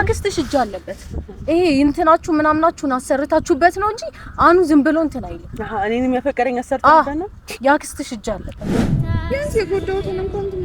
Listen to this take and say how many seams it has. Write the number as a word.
one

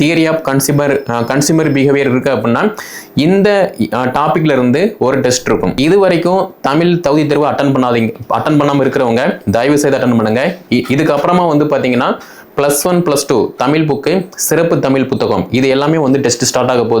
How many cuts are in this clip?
one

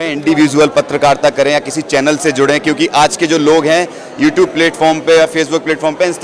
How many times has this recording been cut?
zero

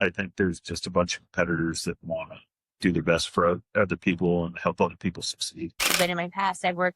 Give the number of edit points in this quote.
one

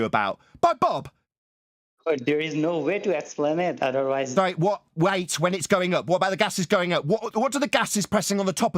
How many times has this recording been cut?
zero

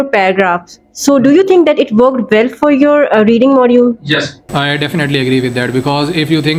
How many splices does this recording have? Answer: zero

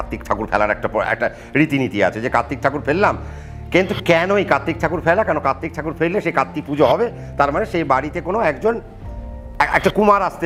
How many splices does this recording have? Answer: zero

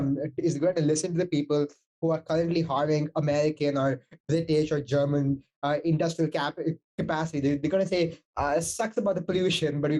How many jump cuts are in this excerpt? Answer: zero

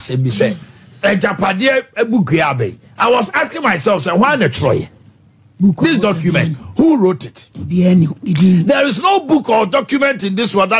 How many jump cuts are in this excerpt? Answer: zero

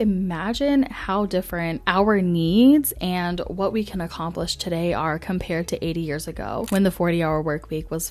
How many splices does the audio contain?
two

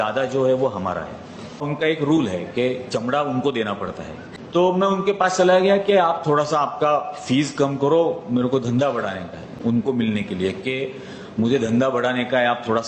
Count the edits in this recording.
three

